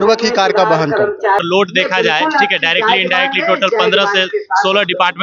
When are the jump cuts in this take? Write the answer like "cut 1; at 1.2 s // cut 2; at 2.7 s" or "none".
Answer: cut 1; at 1.4 s